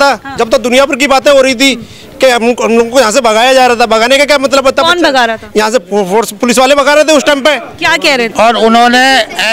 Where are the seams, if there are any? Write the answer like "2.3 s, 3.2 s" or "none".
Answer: 8.3 s